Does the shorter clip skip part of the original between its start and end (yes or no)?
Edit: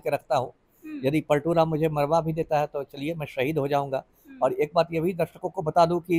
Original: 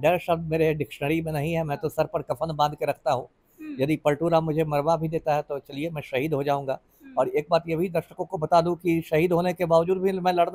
no